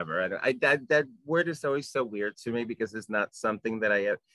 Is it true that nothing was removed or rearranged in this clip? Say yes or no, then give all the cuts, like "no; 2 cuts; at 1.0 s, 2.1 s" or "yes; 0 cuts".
yes; 0 cuts